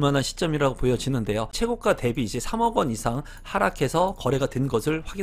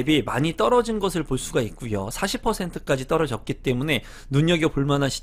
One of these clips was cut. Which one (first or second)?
first